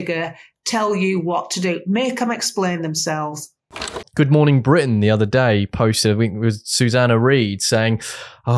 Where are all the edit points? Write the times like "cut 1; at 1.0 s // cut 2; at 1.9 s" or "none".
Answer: cut 1; at 3.9 s